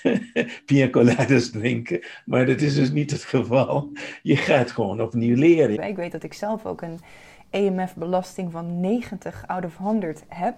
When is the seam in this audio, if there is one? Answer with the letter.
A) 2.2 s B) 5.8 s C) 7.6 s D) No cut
B